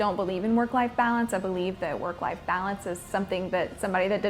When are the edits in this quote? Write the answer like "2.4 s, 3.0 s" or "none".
none